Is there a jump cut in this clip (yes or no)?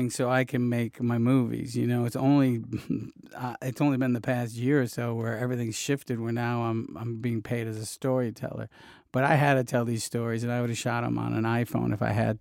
no